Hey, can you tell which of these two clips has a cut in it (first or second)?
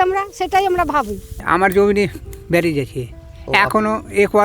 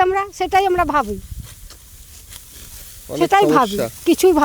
first